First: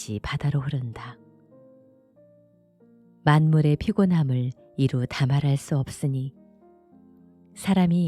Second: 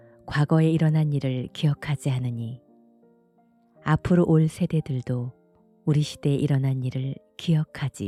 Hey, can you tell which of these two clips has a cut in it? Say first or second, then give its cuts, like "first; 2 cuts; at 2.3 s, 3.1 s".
first; 2 cuts; at 1.1 s, 2.5 s